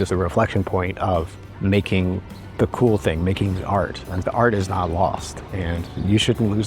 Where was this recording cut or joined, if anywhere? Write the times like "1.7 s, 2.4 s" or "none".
1.4 s, 2.4 s